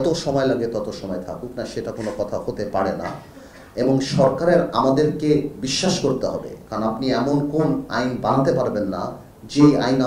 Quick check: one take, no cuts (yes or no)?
yes